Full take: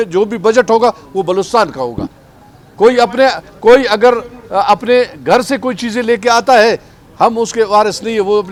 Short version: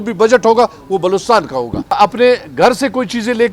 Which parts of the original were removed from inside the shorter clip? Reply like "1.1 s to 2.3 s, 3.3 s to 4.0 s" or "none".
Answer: 2.2 s to 4.6 s